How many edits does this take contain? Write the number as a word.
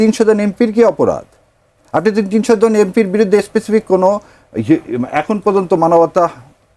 zero